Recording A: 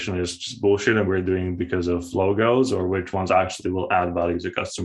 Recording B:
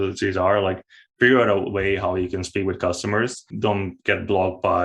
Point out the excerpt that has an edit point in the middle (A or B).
B